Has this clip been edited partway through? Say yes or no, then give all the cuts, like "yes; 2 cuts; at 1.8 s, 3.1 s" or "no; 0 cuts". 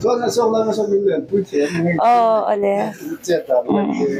no; 0 cuts